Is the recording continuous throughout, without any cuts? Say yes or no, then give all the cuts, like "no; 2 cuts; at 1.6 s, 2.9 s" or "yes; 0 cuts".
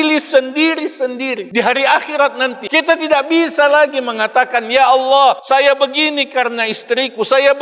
no; 3 cuts; at 1.4 s, 2.6 s, 5.4 s